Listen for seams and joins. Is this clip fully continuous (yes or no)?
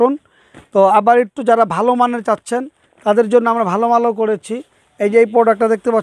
yes